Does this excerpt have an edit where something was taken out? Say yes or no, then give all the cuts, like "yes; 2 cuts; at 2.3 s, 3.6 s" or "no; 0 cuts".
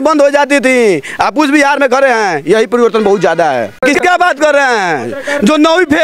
yes; 1 cut; at 3.8 s